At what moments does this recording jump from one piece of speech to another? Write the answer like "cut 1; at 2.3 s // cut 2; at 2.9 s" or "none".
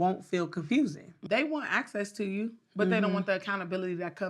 cut 1; at 1.1 s